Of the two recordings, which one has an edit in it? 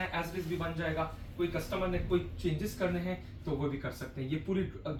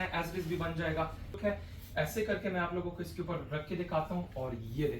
second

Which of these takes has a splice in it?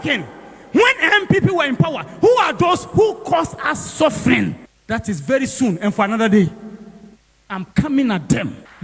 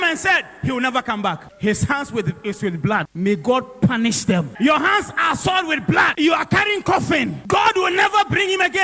second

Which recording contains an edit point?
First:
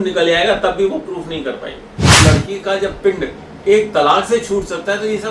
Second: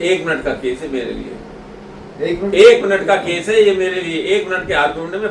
first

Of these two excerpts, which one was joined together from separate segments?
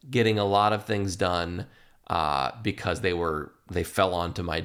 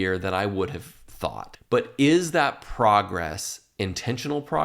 second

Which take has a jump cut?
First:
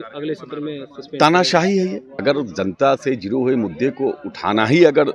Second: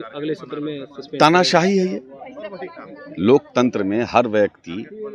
first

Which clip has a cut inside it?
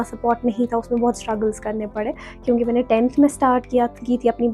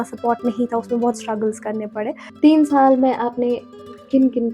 second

